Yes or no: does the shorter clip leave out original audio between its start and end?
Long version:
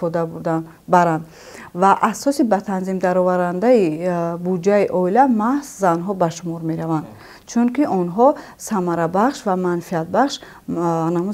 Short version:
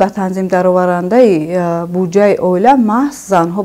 no